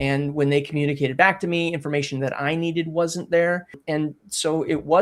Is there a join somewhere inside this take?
yes; 1 cut; at 3.7 s

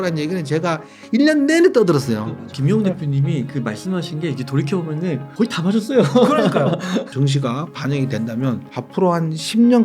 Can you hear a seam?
yes; 4 cuts; at 2.4 s, 5.3 s, 7.1 s, 8.8 s

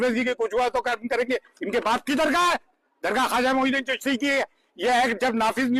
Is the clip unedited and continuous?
yes; 0 cuts

